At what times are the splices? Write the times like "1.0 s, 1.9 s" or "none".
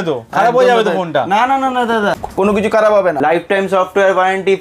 2.2 s, 3.2 s